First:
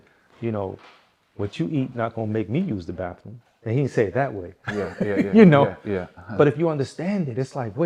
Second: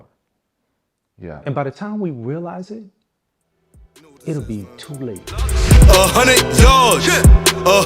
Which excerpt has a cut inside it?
second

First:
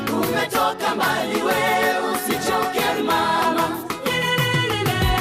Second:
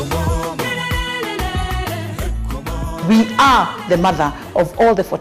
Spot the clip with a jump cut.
second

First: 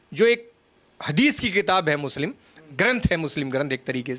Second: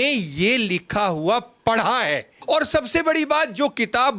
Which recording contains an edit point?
second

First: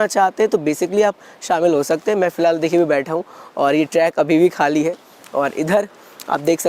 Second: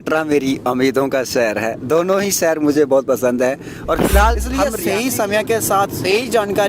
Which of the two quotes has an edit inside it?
second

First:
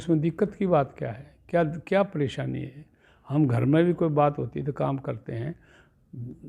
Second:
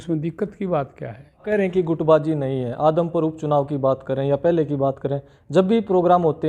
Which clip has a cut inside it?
second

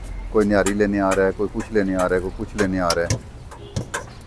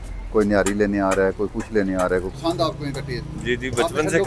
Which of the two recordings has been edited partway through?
second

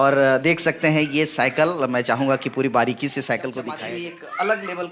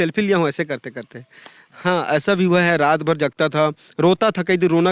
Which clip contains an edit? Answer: first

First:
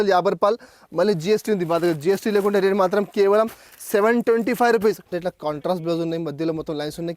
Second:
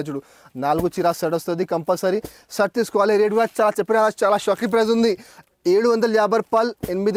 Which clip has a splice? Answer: first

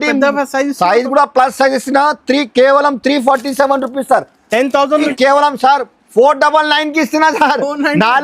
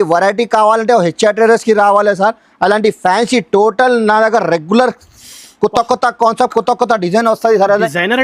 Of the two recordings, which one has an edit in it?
first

